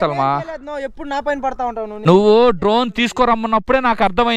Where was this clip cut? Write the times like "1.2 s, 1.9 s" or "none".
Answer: 2.1 s